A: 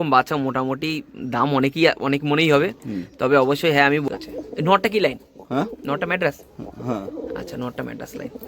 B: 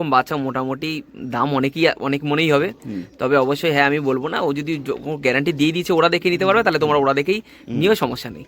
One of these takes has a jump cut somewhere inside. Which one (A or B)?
A